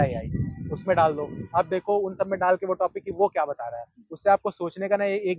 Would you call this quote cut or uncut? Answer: uncut